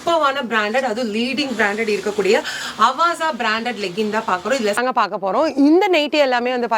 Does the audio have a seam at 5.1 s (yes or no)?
yes